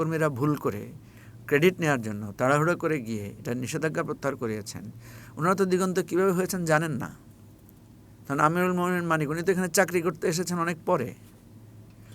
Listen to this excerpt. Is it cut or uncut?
uncut